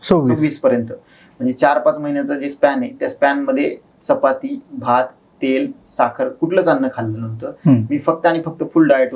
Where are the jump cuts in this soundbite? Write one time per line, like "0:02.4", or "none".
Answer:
none